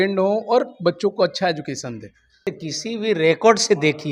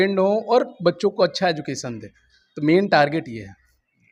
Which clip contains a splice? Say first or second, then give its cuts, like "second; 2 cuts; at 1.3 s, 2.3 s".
first; 1 cut; at 2.5 s